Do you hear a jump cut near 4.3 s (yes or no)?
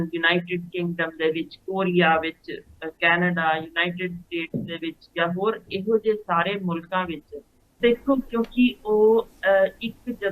no